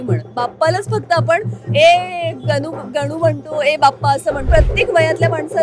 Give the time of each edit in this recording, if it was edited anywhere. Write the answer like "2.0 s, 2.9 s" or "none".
4.4 s